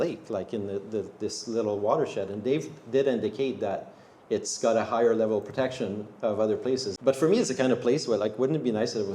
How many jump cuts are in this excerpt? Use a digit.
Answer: 1